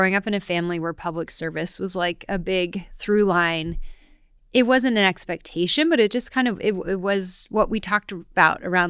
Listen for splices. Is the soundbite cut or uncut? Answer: uncut